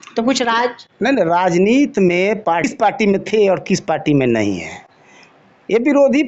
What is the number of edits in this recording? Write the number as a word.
one